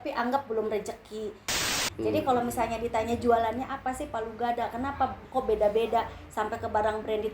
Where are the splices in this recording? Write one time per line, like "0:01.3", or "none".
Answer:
0:01.8